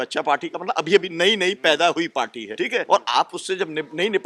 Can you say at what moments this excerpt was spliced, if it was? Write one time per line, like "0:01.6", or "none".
0:02.7